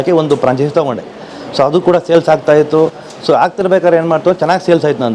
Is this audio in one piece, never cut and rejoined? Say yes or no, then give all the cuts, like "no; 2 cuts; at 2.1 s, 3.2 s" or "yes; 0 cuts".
yes; 0 cuts